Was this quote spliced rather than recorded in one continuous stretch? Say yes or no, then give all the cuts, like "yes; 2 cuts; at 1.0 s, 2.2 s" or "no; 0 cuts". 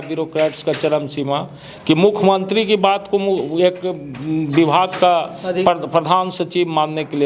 no; 0 cuts